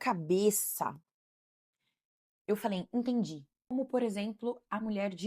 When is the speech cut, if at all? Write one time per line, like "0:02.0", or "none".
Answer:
0:03.7